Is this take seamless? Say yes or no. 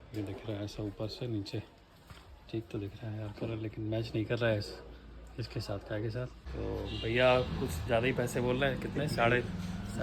no